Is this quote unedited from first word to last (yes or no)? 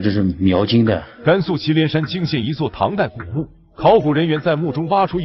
no